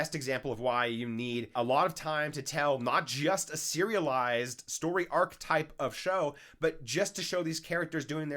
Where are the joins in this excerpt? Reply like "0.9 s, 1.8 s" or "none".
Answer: 1.5 s